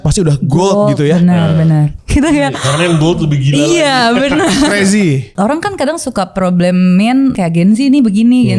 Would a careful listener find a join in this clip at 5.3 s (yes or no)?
yes